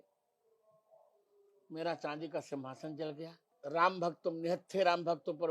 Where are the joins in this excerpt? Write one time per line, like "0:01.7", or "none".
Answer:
0:03.4